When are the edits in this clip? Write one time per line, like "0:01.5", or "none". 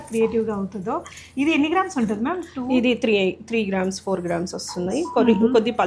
none